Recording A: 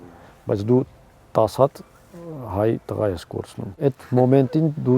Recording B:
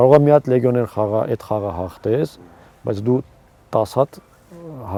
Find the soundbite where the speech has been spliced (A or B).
A